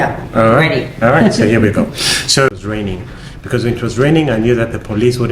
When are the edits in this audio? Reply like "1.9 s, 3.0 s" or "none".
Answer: 2.5 s